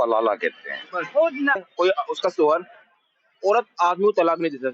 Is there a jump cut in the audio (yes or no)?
yes